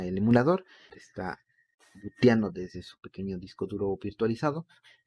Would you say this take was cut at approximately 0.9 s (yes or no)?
yes